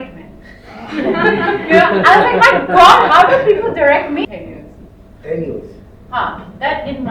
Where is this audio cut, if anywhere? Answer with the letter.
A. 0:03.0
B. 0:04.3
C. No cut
B